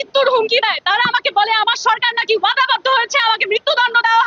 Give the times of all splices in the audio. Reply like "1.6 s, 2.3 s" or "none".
none